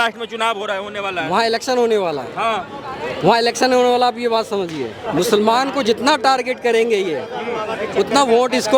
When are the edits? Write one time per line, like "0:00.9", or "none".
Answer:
0:05.0